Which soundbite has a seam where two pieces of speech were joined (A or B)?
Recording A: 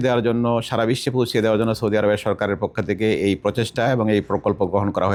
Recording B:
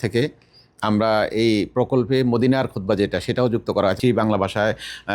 B